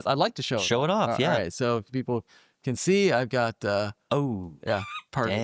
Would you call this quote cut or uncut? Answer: uncut